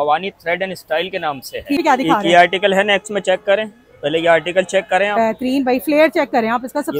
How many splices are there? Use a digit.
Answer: 0